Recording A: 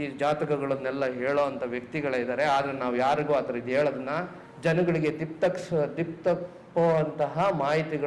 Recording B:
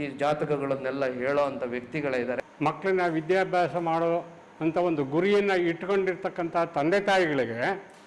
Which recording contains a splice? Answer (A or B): B